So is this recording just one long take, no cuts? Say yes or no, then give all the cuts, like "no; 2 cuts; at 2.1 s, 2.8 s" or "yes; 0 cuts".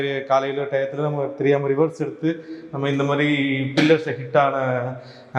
yes; 0 cuts